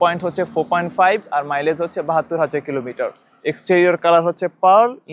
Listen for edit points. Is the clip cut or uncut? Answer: uncut